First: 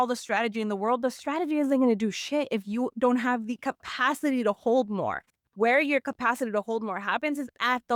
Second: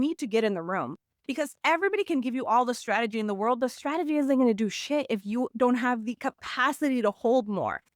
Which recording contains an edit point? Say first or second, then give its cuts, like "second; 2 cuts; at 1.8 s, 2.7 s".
second; 1 cut; at 1.6 s